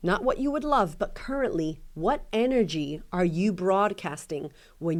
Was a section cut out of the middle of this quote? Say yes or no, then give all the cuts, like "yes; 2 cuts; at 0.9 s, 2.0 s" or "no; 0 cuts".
no; 0 cuts